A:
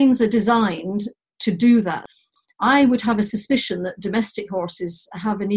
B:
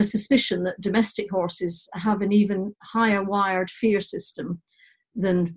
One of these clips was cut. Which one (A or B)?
A